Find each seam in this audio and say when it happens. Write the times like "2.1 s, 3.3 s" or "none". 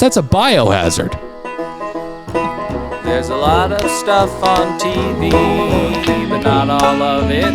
1.8 s